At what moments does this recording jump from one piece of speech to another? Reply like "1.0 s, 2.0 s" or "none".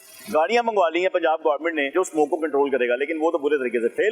1.9 s